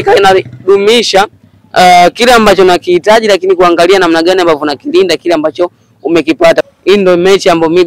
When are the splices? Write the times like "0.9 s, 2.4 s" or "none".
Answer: 6.6 s